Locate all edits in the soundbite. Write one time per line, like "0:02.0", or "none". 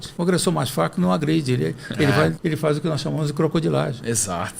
none